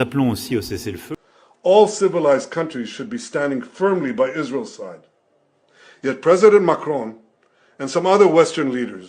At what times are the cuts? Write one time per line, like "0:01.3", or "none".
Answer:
0:01.0